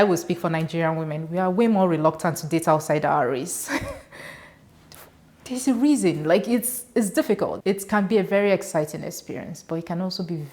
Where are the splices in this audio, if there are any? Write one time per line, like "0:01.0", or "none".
0:07.6